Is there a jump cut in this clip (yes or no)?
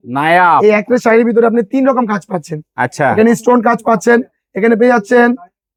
no